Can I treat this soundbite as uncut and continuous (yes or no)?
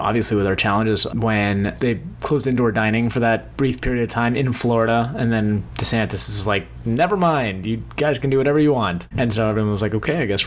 no